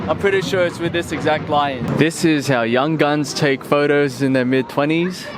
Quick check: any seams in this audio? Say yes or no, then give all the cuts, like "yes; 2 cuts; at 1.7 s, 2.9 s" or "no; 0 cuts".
yes; 1 cut; at 1.8 s